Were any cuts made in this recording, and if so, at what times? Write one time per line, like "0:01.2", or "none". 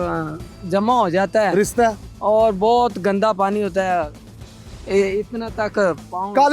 none